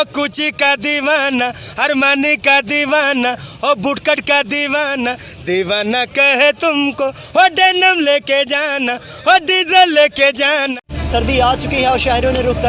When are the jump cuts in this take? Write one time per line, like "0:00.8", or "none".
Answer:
none